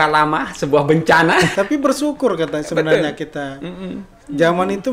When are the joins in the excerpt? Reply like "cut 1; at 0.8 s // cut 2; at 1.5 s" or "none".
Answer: cut 1; at 1.5 s